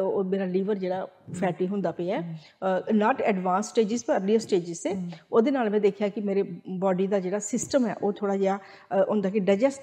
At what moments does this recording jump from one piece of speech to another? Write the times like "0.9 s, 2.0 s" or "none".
none